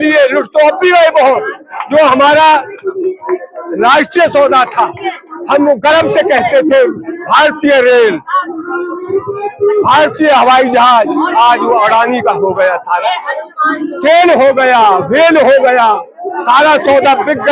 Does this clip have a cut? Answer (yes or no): no